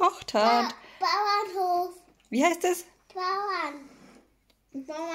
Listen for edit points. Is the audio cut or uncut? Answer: uncut